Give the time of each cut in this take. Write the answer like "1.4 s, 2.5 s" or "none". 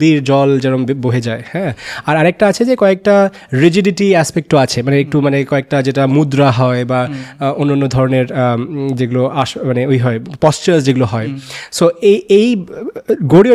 none